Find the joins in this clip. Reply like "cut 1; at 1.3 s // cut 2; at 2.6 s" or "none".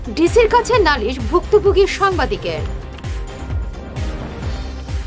none